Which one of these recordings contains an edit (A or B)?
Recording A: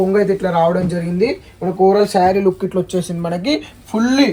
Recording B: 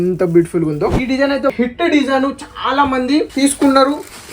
B